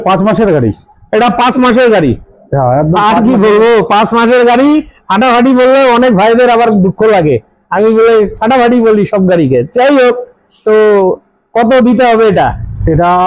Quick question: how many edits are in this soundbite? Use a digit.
0